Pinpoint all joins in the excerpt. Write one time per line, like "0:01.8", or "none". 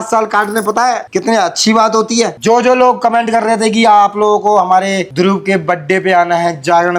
0:02.3